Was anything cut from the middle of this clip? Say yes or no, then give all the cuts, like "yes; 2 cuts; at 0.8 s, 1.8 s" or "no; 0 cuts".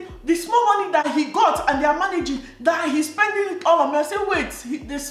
yes; 1 cut; at 1.0 s